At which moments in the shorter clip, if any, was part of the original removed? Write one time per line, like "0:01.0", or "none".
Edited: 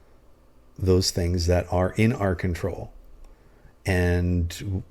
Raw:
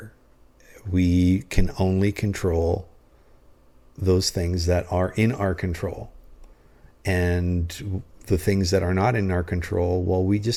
none